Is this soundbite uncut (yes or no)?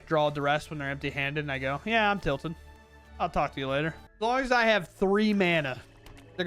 no